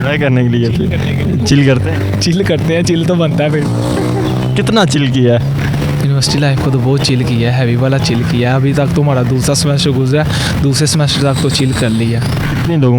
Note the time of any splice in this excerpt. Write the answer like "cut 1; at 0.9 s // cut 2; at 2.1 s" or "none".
none